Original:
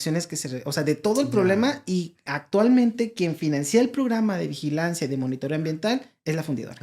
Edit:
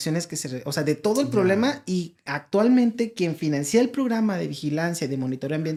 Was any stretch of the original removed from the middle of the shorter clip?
no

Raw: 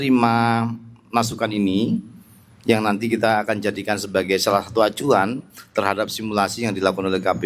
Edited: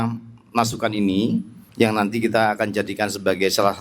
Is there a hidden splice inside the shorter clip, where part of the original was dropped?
yes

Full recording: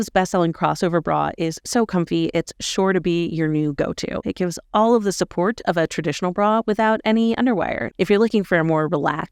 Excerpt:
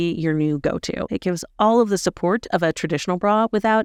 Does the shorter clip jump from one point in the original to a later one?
no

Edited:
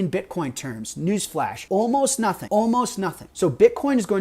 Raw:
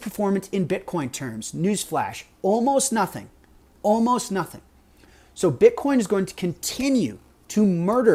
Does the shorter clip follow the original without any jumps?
no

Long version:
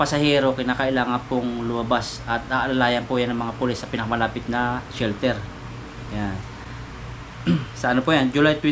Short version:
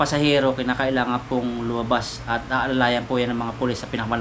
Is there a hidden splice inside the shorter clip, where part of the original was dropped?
no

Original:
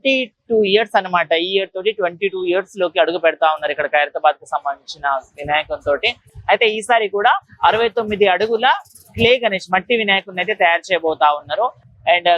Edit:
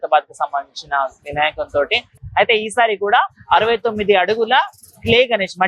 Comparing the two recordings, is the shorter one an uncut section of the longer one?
yes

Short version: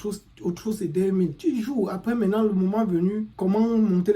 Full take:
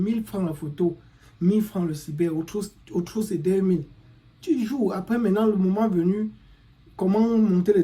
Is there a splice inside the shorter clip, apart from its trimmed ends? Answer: yes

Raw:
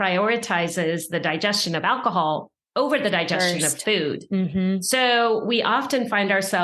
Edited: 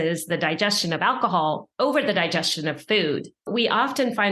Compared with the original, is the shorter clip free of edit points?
no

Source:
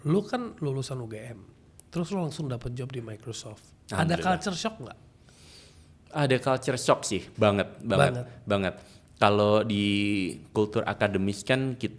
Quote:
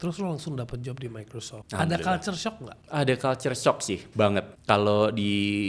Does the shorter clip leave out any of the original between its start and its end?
yes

